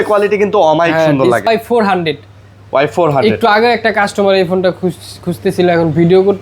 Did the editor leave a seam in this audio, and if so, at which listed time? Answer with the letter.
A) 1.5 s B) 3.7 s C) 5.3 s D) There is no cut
A